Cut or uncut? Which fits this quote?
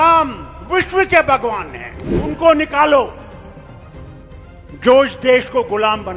cut